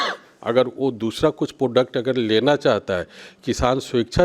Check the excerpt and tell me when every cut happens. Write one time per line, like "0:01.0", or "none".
none